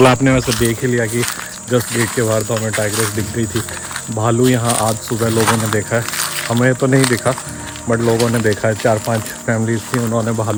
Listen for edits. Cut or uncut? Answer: uncut